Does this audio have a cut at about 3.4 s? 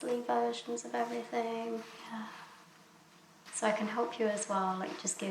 yes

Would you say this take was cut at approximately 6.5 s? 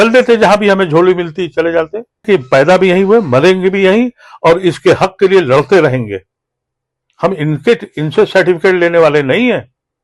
no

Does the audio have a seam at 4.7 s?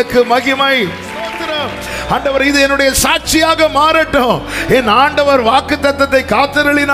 no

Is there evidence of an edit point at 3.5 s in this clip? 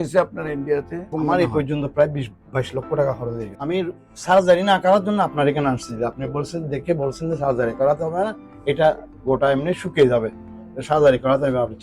yes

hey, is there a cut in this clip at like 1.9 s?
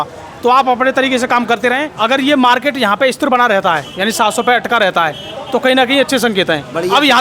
yes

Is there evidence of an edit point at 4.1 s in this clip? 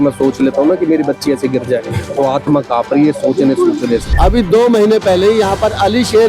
yes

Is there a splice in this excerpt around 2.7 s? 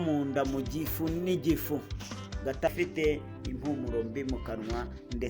yes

